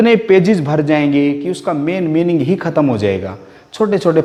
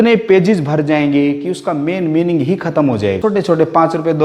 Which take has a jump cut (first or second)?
second